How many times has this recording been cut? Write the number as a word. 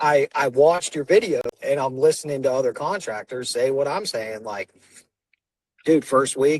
one